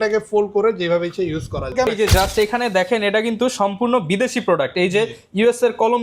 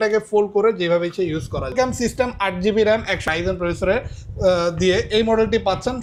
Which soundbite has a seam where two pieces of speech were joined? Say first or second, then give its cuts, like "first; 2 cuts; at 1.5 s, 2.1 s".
first; 1 cut; at 1.9 s